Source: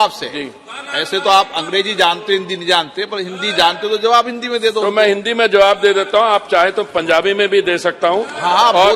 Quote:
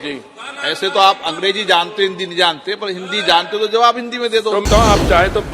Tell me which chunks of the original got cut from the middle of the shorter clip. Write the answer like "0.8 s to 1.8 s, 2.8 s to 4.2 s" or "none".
4.9 s to 6.1 s